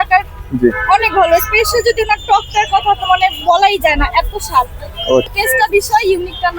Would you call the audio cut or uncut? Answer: cut